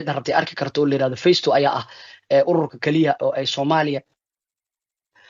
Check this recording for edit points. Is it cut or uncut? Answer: uncut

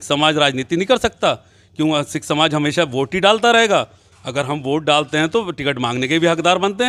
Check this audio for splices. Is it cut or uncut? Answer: uncut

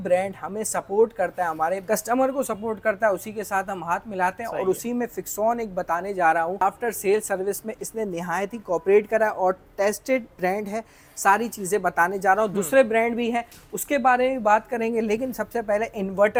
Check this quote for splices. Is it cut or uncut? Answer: uncut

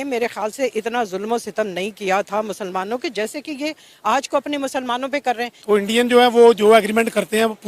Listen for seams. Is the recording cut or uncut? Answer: cut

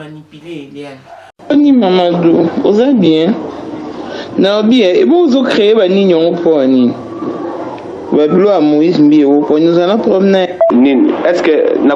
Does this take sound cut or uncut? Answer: cut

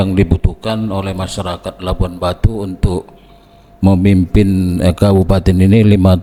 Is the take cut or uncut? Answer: uncut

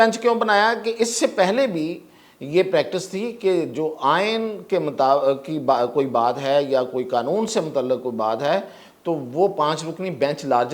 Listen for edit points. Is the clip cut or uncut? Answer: uncut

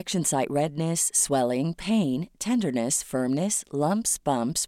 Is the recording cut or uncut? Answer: uncut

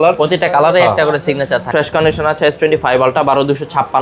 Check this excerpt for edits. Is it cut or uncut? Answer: cut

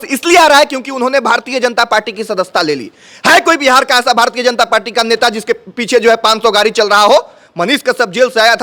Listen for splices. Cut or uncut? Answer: uncut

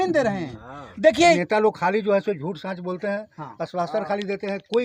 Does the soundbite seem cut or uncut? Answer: cut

